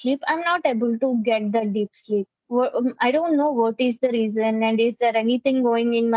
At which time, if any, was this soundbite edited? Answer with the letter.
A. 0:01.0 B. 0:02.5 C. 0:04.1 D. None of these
D